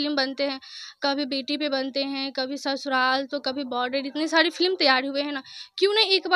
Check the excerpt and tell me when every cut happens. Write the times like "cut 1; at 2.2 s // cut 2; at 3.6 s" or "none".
none

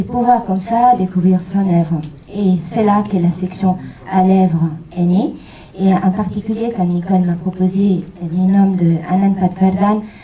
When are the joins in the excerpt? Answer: cut 1; at 3.4 s

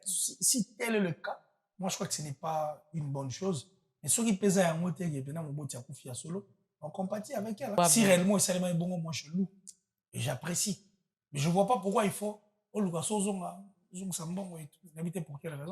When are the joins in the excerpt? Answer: cut 1; at 7.8 s

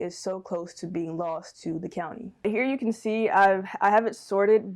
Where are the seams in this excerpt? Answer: cut 1; at 2.5 s

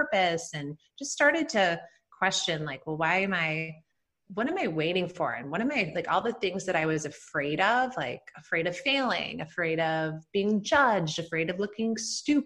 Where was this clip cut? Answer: none

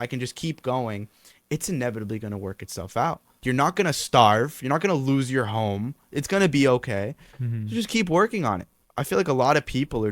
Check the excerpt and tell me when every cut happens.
cut 1; at 3.3 s // cut 2; at 8.7 s

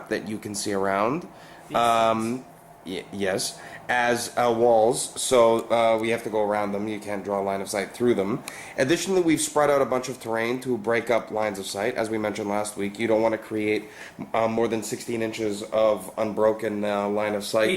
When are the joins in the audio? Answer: cut 1; at 10.8 s

